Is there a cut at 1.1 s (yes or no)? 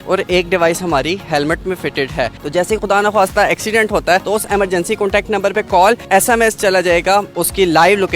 no